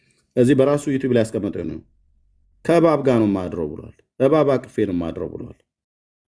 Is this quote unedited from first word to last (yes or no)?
yes